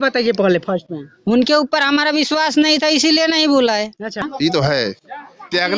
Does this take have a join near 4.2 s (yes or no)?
yes